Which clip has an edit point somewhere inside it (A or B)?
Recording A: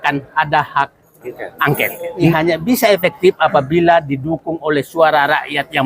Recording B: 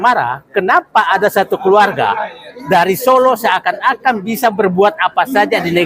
A